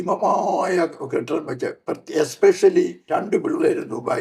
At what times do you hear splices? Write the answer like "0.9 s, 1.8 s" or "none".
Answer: 3.1 s